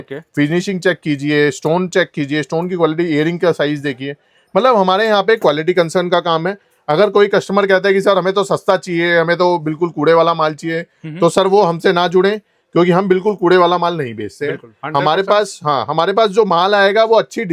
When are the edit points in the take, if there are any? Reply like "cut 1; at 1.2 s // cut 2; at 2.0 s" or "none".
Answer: none